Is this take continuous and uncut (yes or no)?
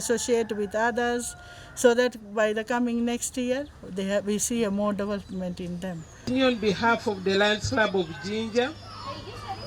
no